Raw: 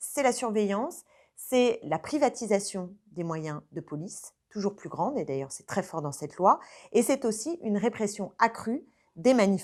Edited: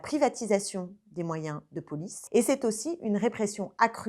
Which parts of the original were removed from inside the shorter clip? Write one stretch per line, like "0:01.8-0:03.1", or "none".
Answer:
0:04.1-0:06.7